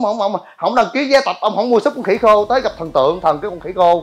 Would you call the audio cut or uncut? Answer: uncut